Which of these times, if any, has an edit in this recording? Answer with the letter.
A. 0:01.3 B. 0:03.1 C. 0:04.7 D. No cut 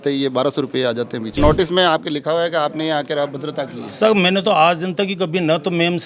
A